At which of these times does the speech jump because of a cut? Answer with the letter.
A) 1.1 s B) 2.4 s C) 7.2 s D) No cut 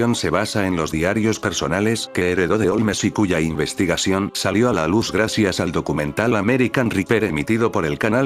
C